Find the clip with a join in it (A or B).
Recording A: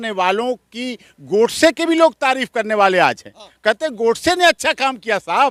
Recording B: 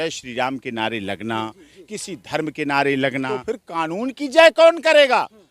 B